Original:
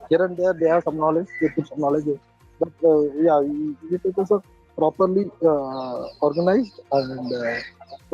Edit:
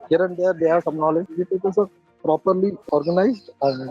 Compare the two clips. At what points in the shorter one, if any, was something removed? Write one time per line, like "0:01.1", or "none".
0:01.3
0:02.8